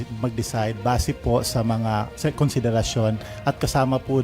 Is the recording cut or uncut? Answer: uncut